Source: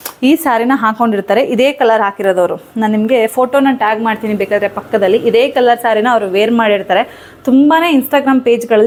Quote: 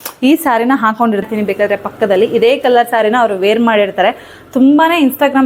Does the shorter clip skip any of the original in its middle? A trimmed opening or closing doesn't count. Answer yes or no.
yes